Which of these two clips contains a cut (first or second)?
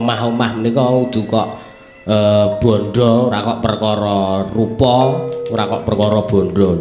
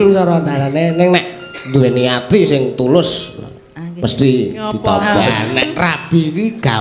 second